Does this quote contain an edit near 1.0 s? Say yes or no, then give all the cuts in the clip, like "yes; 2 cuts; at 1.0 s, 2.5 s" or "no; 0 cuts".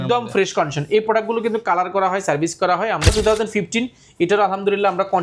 no; 1 cut; at 3.1 s